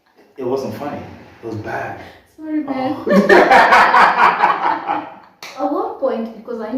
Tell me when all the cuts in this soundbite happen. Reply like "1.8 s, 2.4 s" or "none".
5.6 s